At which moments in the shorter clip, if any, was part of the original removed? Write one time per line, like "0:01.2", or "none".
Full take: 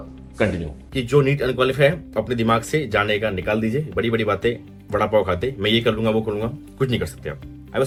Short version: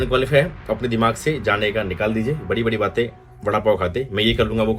none